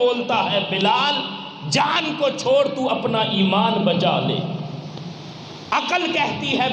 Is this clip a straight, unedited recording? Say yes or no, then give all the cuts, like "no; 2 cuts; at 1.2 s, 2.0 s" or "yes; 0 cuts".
yes; 0 cuts